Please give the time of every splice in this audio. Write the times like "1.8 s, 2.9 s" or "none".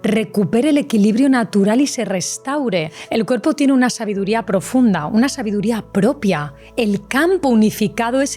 3.0 s, 6.6 s